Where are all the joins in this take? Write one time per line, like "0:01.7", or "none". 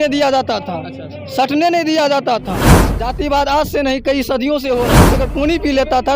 0:02.9
0:05.0